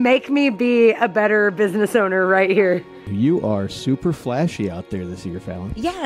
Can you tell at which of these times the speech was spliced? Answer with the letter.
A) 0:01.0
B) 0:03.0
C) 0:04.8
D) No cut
B